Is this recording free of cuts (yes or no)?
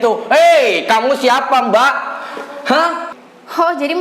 no